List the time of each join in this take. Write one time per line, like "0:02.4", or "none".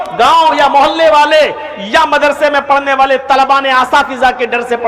none